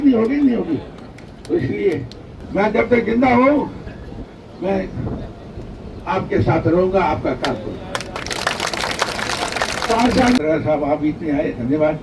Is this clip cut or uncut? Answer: cut